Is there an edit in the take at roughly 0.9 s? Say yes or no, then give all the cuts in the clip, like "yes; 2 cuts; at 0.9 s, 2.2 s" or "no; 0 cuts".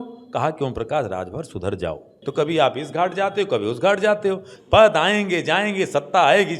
no; 2 cuts; at 2.2 s, 4.5 s